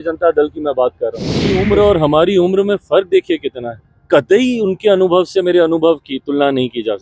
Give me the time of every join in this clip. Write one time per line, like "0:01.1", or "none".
0:01.6